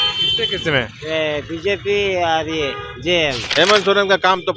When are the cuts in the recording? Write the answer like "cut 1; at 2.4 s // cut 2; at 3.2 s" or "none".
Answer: cut 1; at 3.4 s